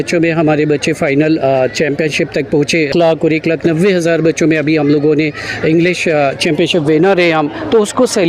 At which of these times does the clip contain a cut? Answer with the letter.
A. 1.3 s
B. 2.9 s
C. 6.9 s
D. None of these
B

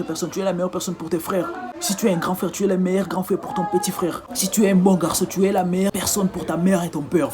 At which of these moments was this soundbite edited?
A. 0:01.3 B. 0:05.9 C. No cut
B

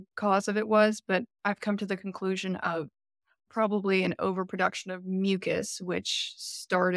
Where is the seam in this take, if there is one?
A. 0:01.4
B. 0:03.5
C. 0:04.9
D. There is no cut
B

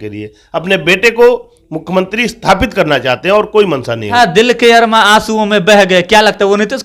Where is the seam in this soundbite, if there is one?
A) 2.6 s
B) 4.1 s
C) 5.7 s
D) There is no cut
B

